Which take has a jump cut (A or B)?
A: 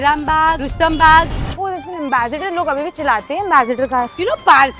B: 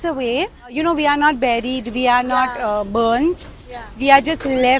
A